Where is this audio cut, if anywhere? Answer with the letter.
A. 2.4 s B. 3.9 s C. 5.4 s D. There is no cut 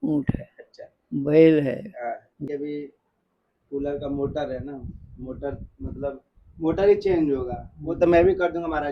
A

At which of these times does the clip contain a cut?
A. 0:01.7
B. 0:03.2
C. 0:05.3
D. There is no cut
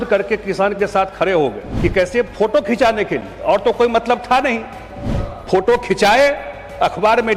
A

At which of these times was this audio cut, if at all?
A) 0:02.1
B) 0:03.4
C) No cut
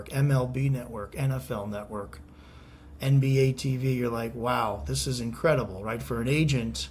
C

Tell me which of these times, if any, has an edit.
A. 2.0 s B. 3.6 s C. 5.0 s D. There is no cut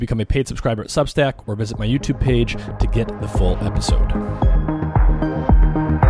B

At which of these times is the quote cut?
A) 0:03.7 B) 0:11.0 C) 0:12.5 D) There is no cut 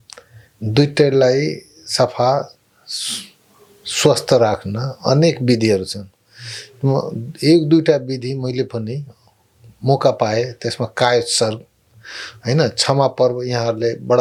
D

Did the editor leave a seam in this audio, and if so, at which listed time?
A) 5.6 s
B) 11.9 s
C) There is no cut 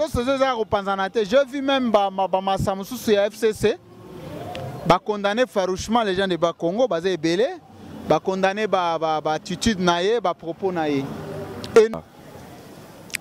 B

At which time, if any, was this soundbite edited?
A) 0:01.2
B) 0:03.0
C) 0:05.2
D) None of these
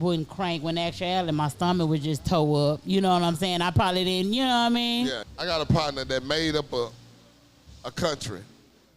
C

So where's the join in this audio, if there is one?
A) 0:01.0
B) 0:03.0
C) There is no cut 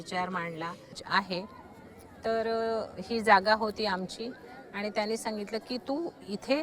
A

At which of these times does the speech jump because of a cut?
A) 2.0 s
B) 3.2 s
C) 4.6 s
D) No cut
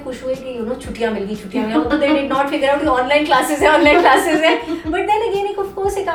D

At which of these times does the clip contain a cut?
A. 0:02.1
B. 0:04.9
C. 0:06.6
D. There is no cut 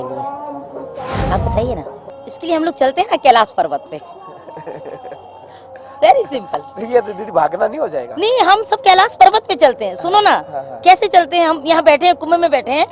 A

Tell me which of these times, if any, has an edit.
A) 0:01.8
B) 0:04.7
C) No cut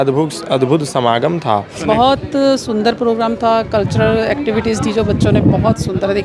A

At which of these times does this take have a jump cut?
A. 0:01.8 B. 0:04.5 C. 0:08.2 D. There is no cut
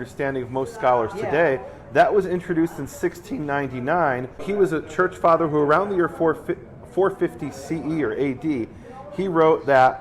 B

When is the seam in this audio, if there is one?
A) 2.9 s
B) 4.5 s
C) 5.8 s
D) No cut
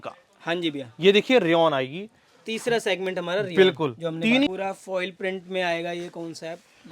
B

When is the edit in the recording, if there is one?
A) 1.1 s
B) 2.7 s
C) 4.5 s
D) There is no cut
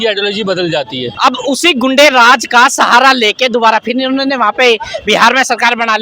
A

